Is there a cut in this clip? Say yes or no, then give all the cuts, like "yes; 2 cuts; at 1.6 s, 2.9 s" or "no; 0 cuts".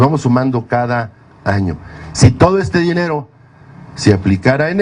yes; 1 cut; at 2.3 s